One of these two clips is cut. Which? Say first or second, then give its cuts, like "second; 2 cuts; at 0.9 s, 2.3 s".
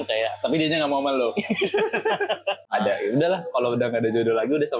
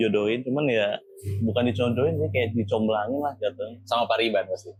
first; 1 cut; at 3.1 s